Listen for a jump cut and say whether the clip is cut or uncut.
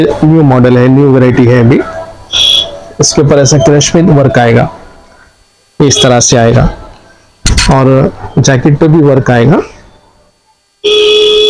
uncut